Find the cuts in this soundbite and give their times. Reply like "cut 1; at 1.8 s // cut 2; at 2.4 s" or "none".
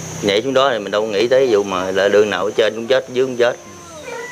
none